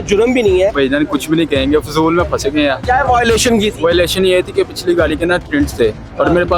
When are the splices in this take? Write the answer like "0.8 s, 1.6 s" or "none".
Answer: 0.7 s, 2.8 s